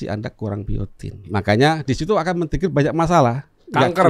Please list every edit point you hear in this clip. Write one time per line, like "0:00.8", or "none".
0:01.3

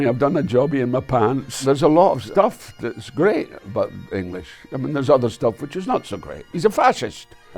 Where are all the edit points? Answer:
0:01.5
0:02.2
0:06.4

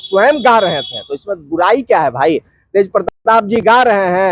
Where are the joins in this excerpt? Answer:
none

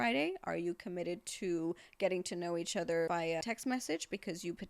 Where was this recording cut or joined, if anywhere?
0:03.2

